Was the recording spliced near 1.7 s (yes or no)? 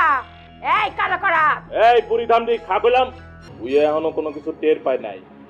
no